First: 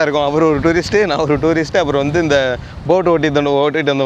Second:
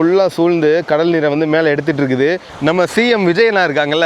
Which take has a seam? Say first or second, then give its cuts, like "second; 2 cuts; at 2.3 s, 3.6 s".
second; 1 cut; at 2.5 s